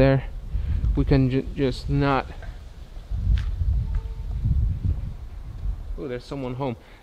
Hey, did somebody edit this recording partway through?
no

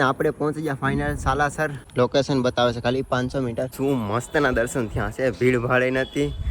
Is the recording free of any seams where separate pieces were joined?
no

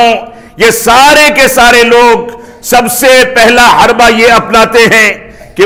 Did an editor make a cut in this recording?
no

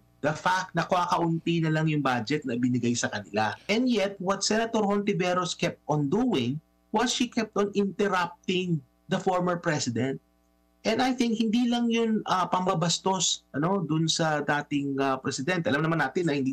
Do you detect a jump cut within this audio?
yes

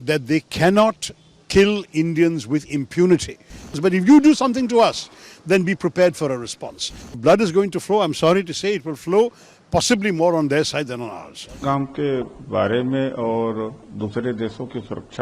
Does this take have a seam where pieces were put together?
yes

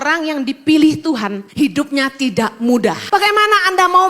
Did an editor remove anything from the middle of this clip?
yes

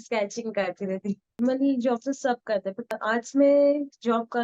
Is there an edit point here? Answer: yes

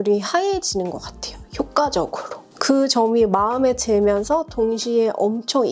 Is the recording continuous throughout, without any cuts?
yes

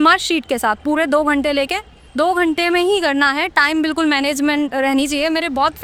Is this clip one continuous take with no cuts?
yes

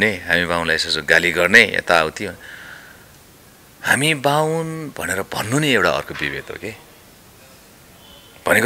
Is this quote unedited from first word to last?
yes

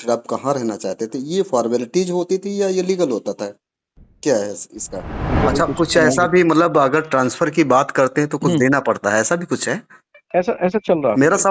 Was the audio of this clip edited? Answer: yes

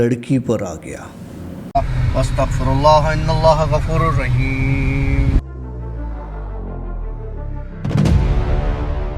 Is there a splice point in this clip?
yes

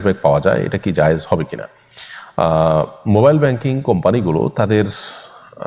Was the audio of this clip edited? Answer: no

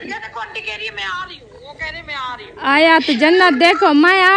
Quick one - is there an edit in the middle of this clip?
no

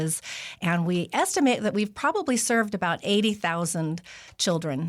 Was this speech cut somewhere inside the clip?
no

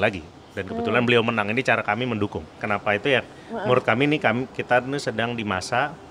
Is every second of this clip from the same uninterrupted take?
yes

